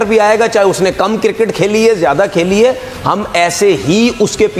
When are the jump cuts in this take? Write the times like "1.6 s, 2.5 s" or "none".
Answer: none